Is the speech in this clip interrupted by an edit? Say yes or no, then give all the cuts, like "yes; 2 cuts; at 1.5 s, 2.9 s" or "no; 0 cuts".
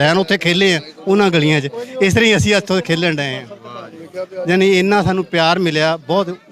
no; 0 cuts